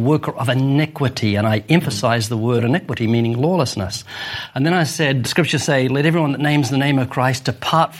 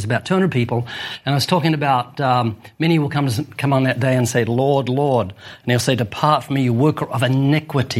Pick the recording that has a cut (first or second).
first